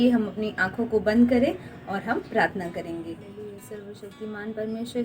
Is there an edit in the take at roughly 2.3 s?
no; 1 cut; at 3.5 s

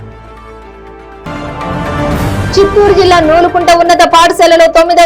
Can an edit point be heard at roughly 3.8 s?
no; 1 cut; at 1.2 s

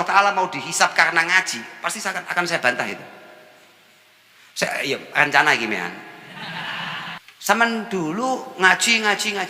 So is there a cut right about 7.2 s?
yes; 1 cut; at 7.2 s

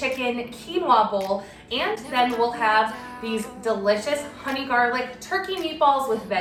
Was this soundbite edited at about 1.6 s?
no; 0 cuts

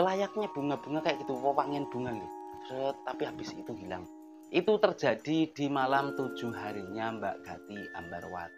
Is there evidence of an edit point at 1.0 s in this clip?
no; 0 cuts

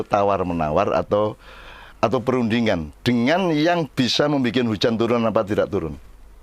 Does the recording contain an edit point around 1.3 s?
no; 0 cuts

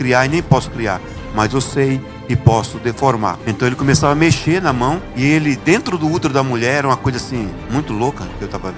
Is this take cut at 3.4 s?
yes; 1 cut; at 3.4 s

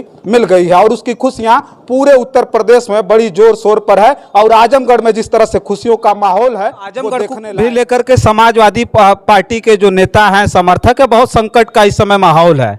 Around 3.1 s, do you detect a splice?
no; 1 cut; at 7.2 s

